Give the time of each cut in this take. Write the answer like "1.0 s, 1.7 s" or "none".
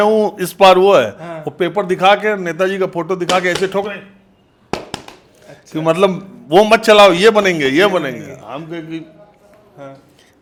none